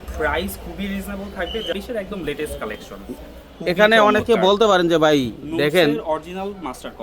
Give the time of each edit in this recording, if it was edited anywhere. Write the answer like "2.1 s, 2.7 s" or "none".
1.7 s